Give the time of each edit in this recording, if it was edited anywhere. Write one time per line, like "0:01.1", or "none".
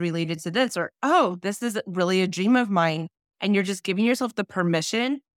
none